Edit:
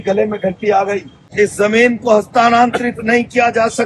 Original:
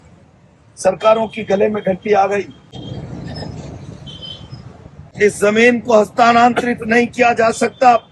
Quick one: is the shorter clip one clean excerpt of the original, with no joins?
no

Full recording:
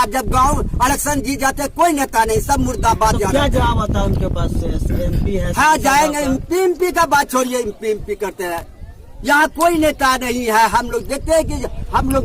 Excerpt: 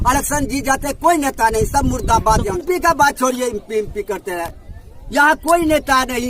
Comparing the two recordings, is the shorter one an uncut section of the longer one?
no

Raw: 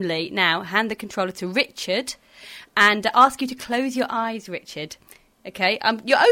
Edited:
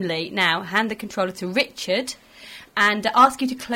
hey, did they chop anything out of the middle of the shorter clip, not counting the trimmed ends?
no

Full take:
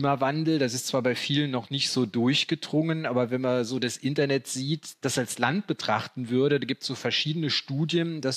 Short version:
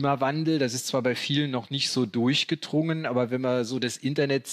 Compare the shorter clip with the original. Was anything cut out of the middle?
no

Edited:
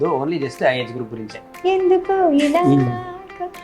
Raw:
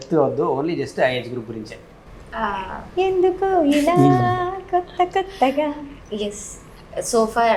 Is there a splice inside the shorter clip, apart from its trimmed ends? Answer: yes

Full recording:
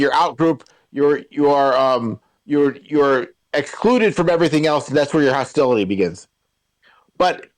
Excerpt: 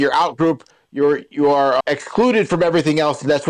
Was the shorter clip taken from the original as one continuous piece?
no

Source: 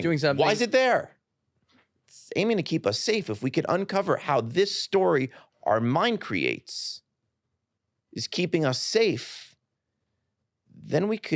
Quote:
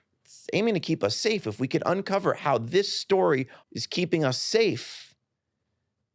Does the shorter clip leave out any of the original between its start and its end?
yes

